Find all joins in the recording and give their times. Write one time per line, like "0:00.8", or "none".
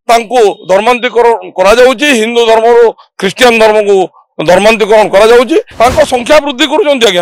0:05.7